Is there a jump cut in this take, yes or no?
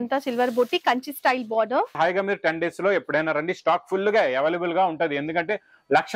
yes